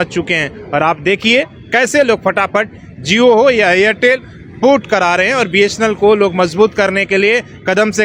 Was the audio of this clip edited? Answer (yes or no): no